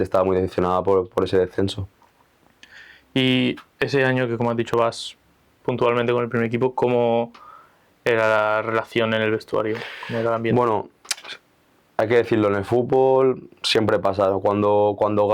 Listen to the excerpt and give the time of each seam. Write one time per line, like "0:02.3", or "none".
none